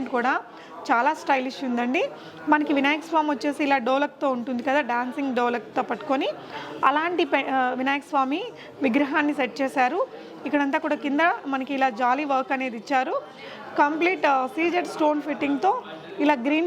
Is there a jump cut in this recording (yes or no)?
no